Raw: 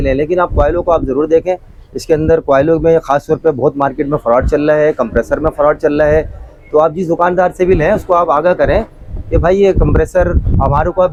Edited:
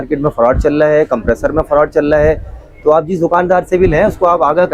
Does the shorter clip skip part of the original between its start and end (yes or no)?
no